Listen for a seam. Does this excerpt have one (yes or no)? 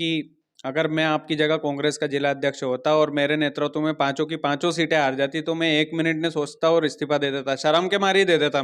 no